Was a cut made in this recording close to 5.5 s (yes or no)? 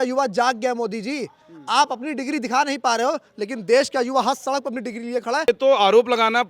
yes